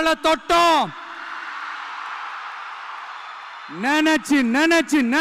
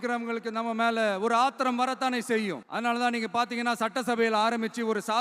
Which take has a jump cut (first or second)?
second